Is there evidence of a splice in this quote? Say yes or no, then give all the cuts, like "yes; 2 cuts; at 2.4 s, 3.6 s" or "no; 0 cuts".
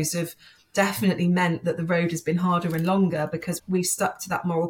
yes; 1 cut; at 3.5 s